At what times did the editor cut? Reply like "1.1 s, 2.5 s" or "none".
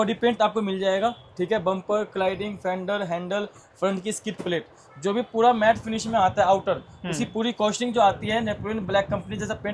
none